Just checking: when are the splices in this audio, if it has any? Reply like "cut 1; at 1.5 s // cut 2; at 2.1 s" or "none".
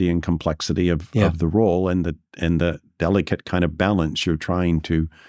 none